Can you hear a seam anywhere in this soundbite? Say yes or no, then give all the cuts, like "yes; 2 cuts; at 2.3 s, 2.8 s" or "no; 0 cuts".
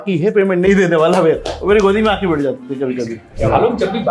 yes; 1 cut; at 3.2 s